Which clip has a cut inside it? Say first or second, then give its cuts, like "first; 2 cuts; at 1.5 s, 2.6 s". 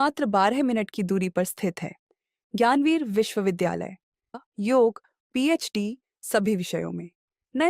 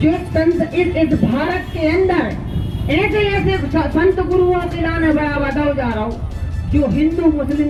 first; 1 cut; at 4.3 s